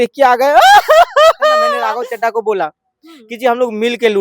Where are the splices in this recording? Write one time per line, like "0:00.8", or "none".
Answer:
0:01.8